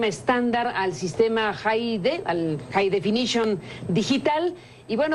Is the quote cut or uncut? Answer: cut